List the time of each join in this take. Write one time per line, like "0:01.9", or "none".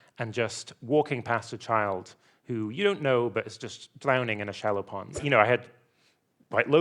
0:05.2